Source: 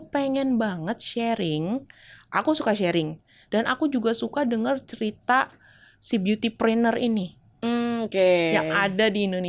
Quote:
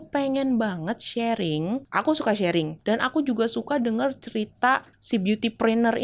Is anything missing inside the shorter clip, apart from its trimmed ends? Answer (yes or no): yes